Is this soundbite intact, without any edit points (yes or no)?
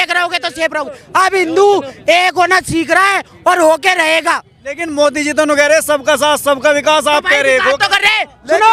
yes